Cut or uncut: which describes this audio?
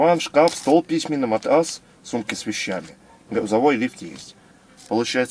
uncut